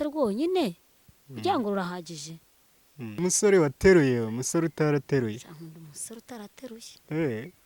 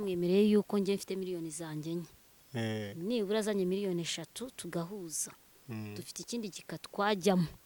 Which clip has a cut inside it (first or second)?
first